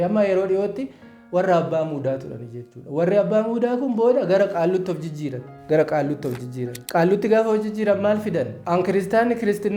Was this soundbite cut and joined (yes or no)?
yes